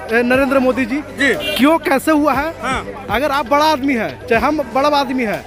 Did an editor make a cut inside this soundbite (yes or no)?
no